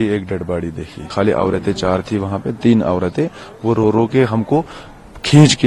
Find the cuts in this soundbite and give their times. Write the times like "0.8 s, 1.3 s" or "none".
1.0 s

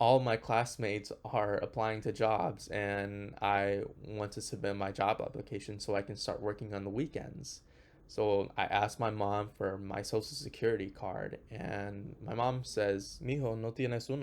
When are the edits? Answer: 13.1 s

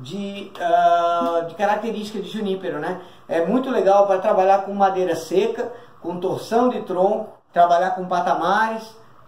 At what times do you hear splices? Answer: 7.4 s

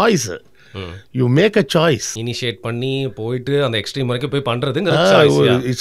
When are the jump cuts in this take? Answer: 2.1 s

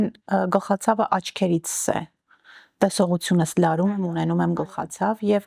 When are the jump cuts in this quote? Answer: none

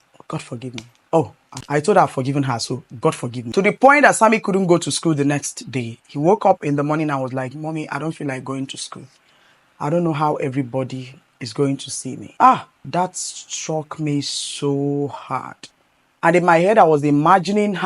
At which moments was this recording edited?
1.5 s, 3.3 s, 12.2 s, 12.7 s

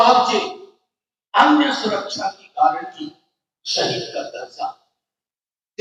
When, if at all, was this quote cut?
none

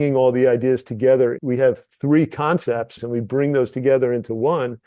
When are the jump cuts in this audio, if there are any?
1.4 s, 2.9 s

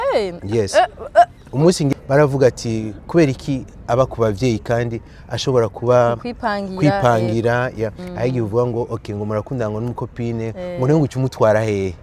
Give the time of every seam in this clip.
2.0 s, 8.0 s

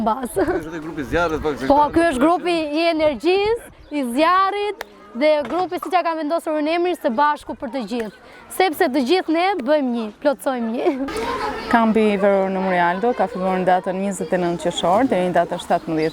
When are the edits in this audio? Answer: 11.1 s

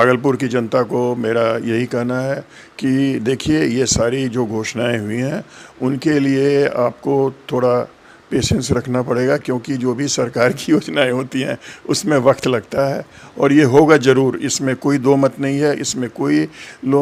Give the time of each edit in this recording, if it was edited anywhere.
none

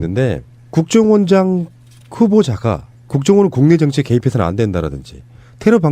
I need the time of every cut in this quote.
3.9 s

